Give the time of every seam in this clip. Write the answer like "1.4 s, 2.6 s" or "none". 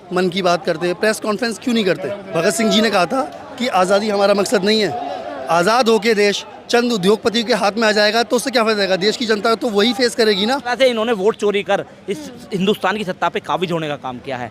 2.3 s, 10.7 s